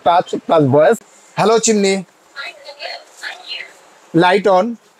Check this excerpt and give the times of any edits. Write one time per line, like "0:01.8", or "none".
0:01.2